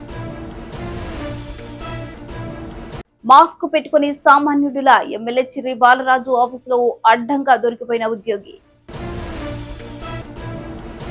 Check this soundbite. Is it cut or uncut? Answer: cut